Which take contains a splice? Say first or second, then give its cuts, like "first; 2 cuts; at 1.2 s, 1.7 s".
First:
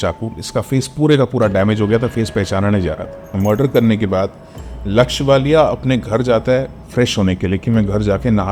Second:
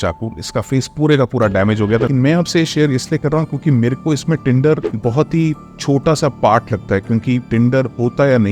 second; 2 cuts; at 2.1 s, 4.9 s